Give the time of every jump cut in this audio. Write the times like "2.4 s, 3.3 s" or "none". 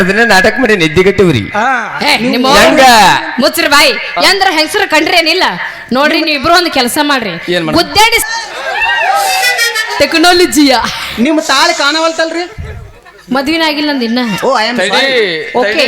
8.2 s